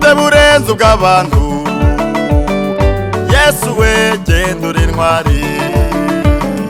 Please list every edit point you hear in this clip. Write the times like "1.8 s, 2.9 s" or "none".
none